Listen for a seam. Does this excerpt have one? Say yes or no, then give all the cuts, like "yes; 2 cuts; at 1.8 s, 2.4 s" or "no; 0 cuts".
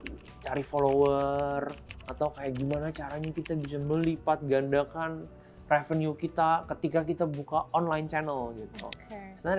no; 0 cuts